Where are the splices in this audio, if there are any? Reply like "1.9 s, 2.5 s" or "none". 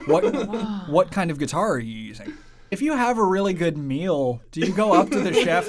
2.5 s